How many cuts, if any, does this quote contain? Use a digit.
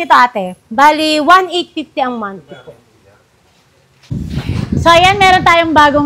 1